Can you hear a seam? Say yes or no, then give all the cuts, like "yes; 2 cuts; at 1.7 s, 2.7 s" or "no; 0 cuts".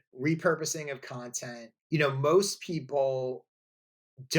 yes; 1 cut; at 1.7 s